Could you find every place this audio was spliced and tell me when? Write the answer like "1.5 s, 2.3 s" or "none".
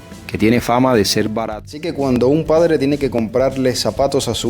1.5 s